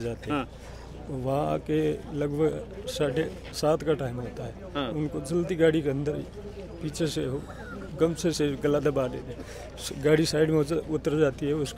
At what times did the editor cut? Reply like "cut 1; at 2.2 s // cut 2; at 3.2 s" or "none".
none

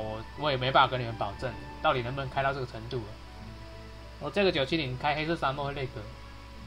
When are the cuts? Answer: cut 1; at 5.6 s

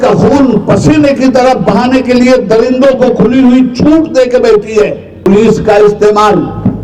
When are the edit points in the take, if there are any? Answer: cut 1; at 5.3 s

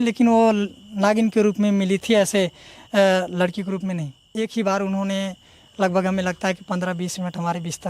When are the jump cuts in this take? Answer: cut 1; at 4.2 s

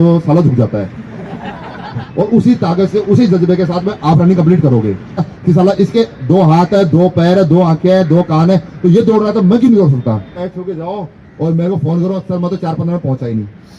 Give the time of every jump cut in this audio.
cut 1; at 2.1 s // cut 2; at 5.3 s // cut 3; at 10.4 s

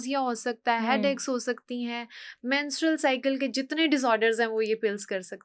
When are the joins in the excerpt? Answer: none

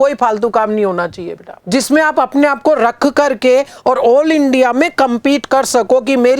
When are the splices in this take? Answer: cut 1; at 1.6 s

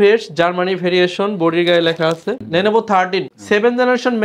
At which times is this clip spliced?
cut 1; at 2.4 s // cut 2; at 3.3 s

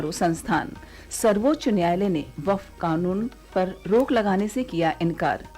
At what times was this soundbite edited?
cut 1; at 3.4 s

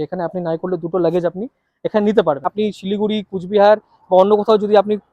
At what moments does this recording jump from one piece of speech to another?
cut 1; at 2.5 s

